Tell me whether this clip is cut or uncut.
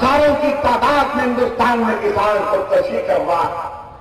uncut